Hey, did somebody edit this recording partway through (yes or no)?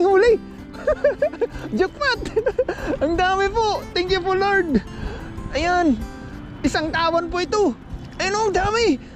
no